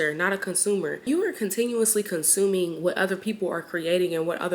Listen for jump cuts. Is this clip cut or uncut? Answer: cut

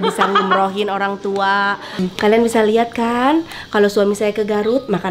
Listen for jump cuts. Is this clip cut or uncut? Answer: cut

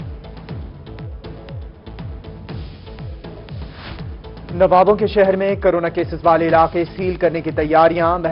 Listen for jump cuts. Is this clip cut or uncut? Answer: uncut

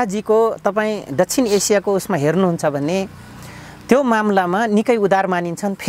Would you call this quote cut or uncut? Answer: uncut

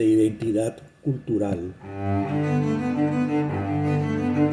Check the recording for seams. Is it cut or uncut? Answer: cut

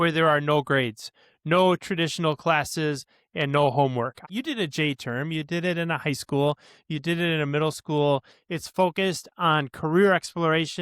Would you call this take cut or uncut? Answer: cut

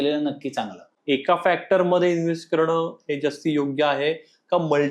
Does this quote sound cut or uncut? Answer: cut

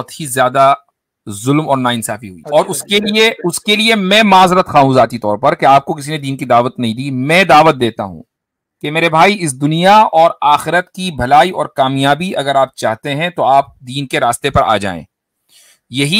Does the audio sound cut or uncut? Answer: cut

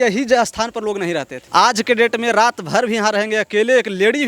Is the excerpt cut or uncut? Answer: cut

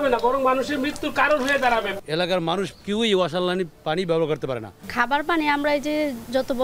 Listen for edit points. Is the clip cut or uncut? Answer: uncut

